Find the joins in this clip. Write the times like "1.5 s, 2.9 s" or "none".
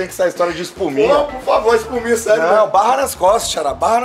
none

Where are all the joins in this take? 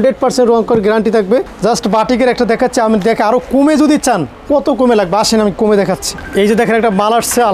1.5 s, 6.1 s

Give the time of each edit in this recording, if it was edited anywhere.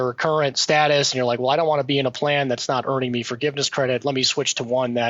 none

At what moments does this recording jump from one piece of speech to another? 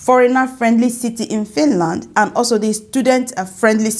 none

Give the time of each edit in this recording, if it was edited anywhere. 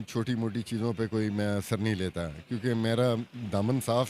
none

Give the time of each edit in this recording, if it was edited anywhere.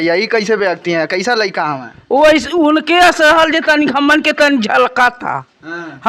none

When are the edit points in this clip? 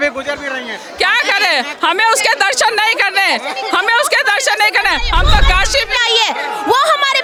none

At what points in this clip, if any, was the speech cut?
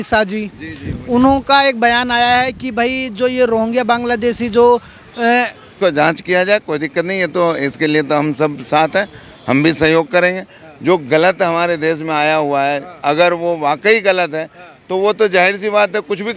5.7 s

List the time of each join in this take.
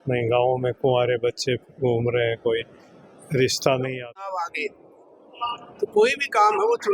4.3 s

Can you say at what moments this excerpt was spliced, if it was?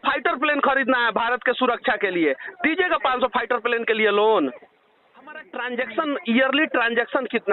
5.4 s

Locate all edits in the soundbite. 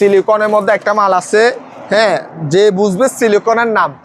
none

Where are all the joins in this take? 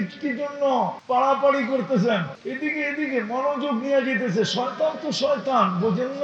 1.0 s, 2.4 s

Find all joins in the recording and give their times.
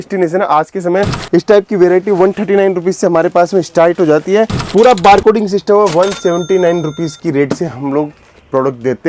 1.2 s, 4.6 s

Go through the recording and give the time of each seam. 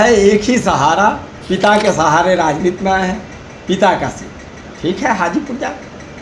1.3 s

